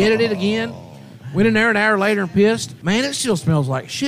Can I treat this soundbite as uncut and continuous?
no; 1 cut; at 2.7 s

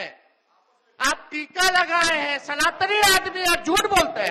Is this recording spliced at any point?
no; 0 cuts

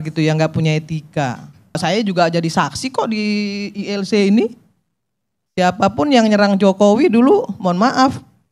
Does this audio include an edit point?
yes; 1 cut; at 1.8 s

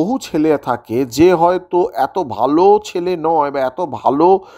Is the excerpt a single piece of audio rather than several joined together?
yes; 0 cuts

